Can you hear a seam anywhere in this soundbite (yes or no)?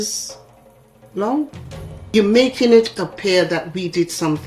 yes